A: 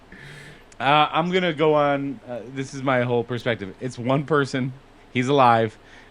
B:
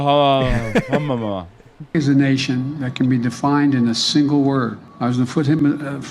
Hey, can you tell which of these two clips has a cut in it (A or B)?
B